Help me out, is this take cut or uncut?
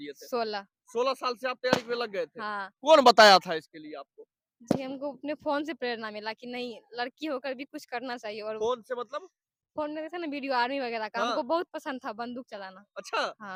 uncut